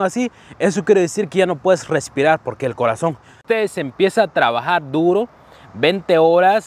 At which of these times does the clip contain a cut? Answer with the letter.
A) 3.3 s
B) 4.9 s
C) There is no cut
A